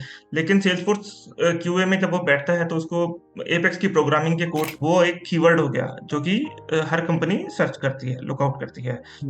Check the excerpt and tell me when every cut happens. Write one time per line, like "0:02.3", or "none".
0:04.7